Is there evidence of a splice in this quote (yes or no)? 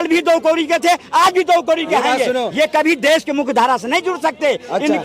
no